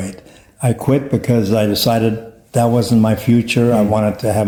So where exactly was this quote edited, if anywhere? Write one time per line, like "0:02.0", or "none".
none